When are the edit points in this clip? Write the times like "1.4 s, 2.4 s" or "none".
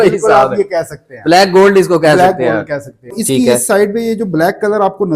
3.1 s